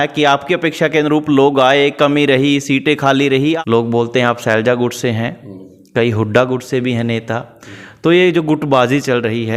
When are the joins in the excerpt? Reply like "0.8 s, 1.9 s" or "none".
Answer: 3.6 s